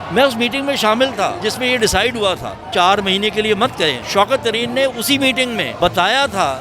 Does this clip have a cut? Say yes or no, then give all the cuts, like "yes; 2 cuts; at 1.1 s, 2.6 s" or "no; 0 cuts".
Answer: yes; 4 cuts; at 1.4 s, 2.6 s, 4.0 s, 5.7 s